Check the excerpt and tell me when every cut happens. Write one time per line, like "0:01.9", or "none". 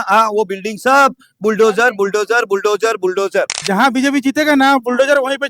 0:03.6